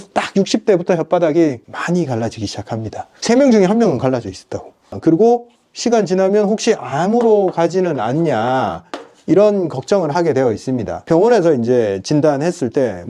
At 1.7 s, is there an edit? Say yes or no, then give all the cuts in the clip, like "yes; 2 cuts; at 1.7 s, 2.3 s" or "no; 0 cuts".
no; 1 cut; at 4.9 s